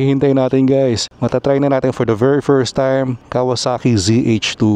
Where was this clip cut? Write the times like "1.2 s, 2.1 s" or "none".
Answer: 1.1 s, 3.2 s